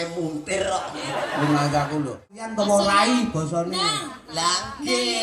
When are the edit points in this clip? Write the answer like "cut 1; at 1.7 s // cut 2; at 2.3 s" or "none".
cut 1; at 2.4 s